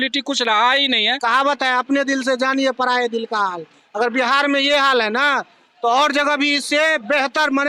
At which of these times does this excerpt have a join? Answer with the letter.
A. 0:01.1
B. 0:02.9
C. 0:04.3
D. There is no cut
A